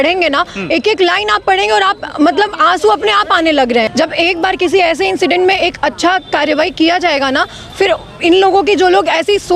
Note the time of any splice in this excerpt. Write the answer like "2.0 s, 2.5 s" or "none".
3.9 s